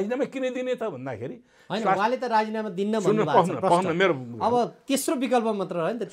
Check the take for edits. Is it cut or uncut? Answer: uncut